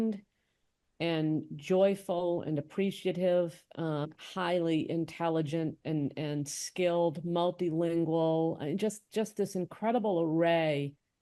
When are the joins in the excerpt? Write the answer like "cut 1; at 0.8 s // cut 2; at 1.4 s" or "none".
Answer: cut 1; at 4.1 s

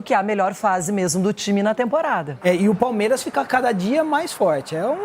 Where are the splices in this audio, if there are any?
cut 1; at 2.3 s

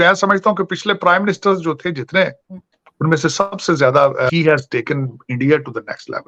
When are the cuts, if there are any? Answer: cut 1; at 4.3 s

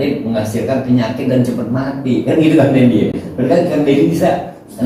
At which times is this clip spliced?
none

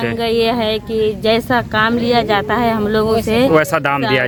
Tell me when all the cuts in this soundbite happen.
none

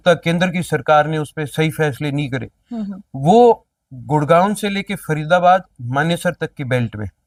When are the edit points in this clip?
none

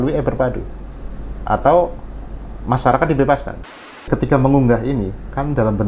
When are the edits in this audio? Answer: cut 1; at 4.1 s

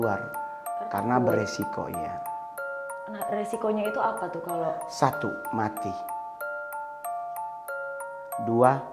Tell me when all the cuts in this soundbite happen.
cut 1; at 1.8 s // cut 2; at 3.3 s

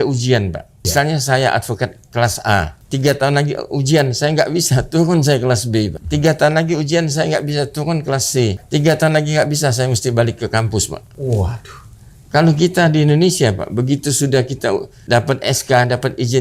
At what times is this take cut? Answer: cut 1; at 0.9 s // cut 2; at 2.8 s // cut 3; at 6.0 s // cut 4; at 8.6 s // cut 5; at 11.1 s // cut 6; at 14.9 s

